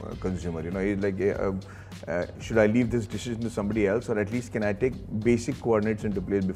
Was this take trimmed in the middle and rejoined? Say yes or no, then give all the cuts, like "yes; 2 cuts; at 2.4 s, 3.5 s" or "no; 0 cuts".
no; 0 cuts